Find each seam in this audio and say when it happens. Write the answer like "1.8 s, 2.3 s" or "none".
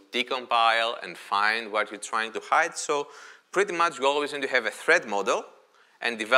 none